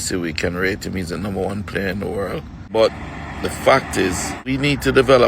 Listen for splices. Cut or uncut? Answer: cut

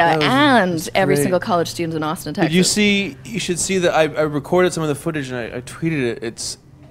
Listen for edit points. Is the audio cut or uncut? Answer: uncut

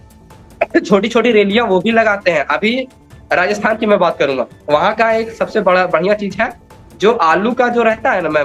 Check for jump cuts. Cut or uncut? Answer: uncut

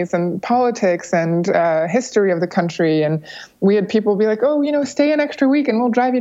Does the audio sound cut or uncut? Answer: uncut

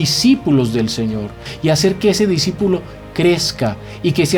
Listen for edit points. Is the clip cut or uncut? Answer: cut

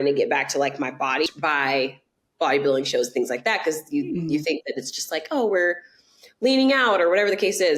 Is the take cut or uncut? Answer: cut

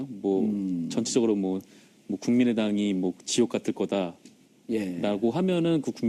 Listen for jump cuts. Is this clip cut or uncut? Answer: uncut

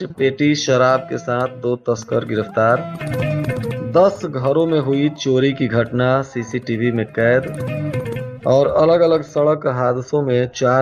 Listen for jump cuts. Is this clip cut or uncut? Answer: uncut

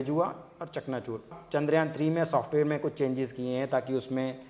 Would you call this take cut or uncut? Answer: cut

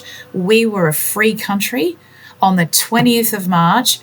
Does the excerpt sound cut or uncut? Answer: uncut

